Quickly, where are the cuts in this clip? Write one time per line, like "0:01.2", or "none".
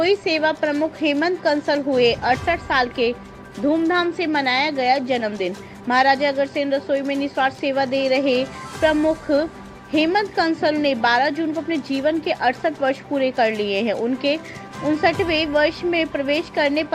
none